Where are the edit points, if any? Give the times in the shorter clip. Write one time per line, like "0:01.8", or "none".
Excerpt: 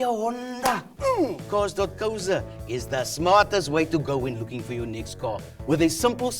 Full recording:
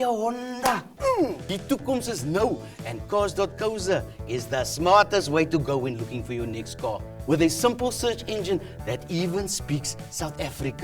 0:01.4

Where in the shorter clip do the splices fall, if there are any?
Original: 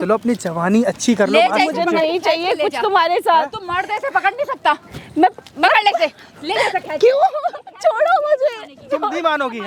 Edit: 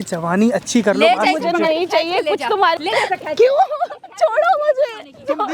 0:02.8

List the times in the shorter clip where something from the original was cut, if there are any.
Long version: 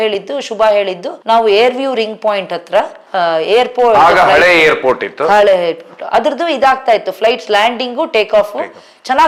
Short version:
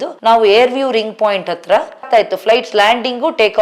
0:02.0

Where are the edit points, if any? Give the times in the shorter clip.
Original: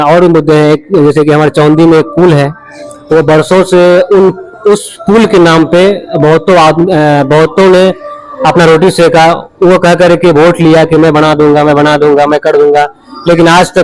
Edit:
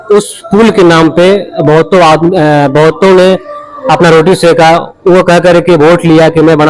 none

